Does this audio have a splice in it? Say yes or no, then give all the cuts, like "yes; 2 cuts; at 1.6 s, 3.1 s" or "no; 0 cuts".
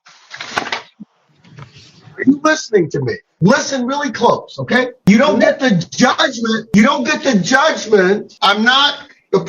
yes; 2 cuts; at 5.0 s, 8.3 s